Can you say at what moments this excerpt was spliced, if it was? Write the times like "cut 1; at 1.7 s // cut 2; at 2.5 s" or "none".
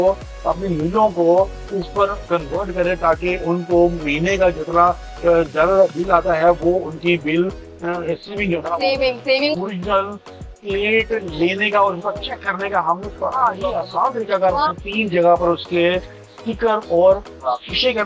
cut 1; at 9.5 s // cut 2; at 14.6 s